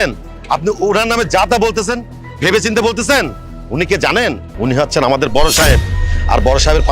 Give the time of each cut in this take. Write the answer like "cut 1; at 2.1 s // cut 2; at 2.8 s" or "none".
cut 1; at 4.5 s